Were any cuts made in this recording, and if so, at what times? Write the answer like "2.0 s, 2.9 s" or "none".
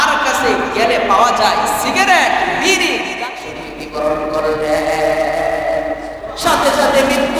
3.2 s